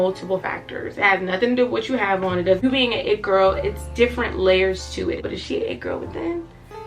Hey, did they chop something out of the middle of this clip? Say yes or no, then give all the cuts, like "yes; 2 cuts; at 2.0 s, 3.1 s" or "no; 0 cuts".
yes; 2 cuts; at 2.6 s, 5.3 s